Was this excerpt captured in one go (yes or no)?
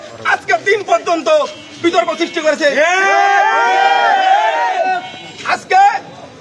yes